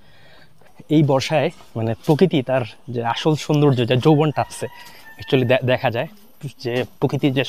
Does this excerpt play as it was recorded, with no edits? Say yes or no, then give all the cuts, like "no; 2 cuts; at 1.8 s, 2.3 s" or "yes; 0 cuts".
yes; 0 cuts